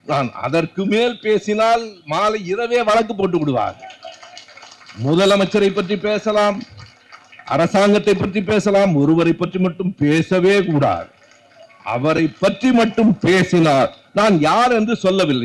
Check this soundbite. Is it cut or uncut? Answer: uncut